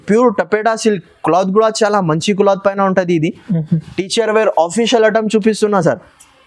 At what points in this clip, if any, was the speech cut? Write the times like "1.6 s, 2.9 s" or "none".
none